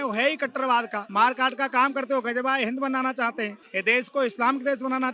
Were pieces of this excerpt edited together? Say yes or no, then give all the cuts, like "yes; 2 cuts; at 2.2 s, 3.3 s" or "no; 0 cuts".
yes; 2 cuts; at 1.0 s, 3.6 s